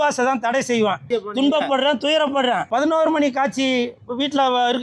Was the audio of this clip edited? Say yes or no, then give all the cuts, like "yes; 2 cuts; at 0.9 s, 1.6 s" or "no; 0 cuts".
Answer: yes; 2 cuts; at 1.1 s, 2.7 s